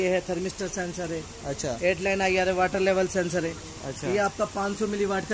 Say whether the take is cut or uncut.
uncut